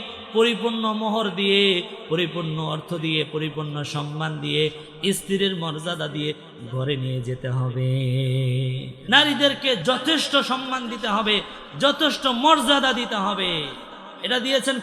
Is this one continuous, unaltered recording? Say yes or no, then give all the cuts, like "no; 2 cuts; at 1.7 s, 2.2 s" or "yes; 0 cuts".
no; 2 cuts; at 8.9 s, 9.8 s